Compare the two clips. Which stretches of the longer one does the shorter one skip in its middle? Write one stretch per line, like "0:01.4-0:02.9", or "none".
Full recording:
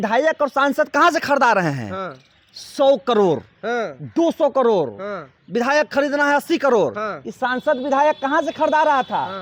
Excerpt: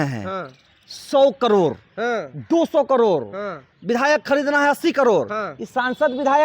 none